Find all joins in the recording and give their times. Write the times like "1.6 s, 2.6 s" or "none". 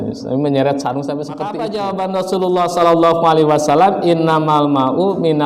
1.5 s